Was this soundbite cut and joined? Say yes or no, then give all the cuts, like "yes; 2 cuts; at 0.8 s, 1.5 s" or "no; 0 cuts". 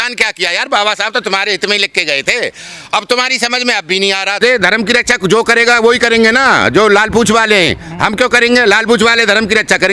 yes; 1 cut; at 4.4 s